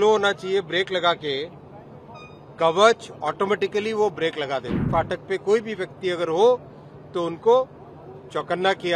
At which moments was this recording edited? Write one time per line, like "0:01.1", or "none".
0:04.8